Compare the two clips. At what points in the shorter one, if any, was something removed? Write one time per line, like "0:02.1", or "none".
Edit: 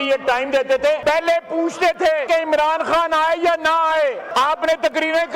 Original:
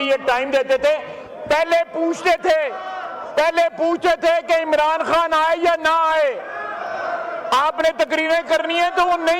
0:01.0
0:02.2
0:04.2